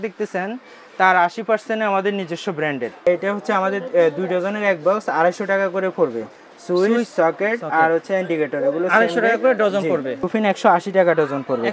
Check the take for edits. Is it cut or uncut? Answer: cut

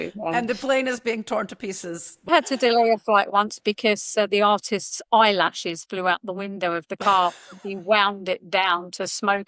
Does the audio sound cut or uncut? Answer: cut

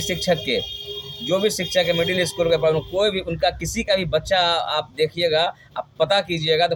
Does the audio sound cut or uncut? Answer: uncut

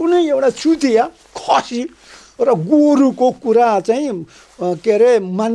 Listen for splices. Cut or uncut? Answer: uncut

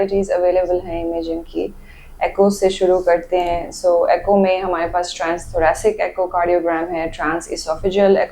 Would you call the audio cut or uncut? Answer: uncut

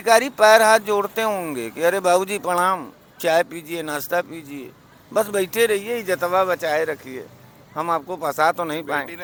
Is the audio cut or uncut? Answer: uncut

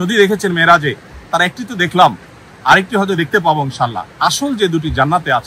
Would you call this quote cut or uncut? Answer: uncut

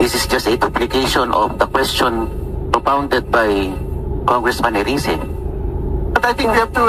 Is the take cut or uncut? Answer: uncut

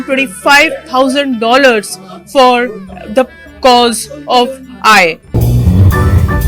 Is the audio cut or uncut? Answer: cut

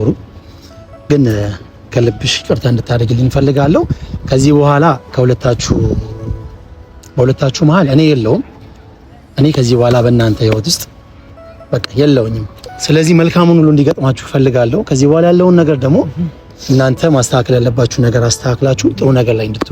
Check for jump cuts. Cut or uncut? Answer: cut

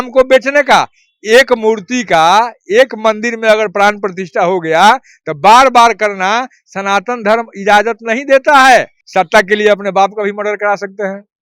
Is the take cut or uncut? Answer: cut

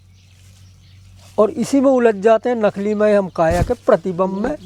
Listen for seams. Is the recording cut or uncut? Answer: uncut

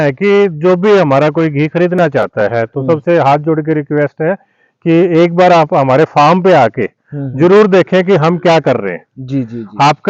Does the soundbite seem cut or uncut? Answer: uncut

